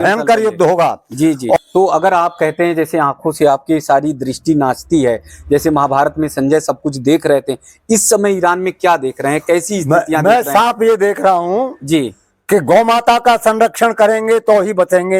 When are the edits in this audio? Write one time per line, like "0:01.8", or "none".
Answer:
0:01.6